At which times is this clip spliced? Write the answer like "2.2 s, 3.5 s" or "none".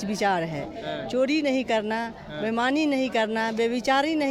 none